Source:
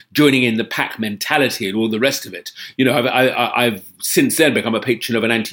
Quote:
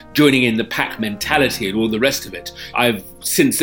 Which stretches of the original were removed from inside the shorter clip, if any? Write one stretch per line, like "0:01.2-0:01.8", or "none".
0:02.7-0:03.5